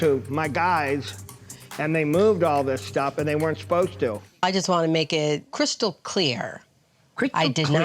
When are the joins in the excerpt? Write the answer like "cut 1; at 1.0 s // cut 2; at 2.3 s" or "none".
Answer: cut 1; at 4.3 s // cut 2; at 5.5 s